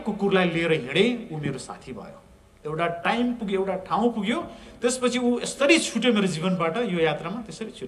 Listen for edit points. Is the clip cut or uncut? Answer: uncut